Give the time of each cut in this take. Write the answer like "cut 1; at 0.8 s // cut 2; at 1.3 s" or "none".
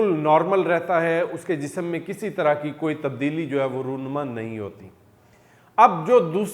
none